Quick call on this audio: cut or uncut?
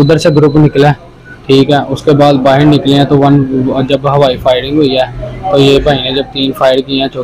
uncut